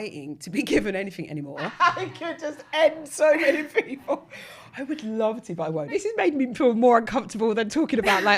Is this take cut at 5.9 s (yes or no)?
yes